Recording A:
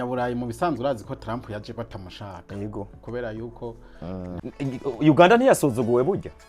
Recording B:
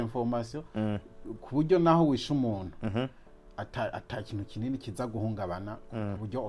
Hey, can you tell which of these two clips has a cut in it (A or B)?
A